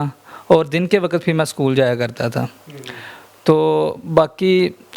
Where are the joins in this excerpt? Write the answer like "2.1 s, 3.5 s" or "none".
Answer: none